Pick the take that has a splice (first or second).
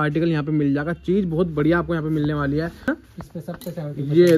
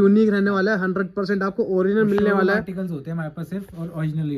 first